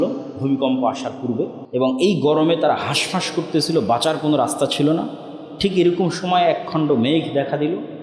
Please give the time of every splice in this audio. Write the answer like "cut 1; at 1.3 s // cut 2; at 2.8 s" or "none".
cut 1; at 1.6 s